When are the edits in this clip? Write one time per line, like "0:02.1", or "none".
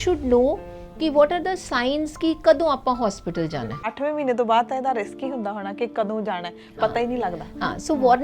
0:03.9